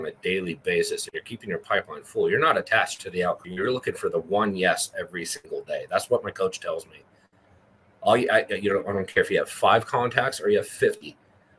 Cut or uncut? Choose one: cut